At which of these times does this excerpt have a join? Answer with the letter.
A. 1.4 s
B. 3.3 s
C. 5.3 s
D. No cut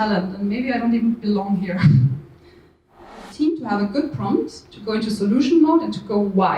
B